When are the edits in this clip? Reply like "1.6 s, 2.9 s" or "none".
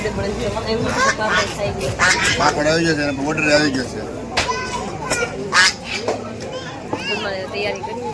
none